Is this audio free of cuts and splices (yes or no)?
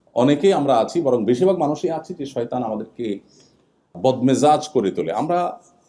no